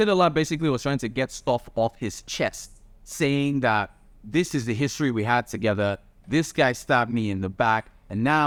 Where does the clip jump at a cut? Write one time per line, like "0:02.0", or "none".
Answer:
none